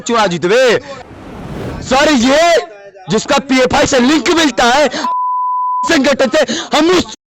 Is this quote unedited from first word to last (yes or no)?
no